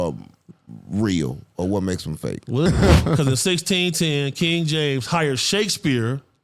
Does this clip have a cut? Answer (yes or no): yes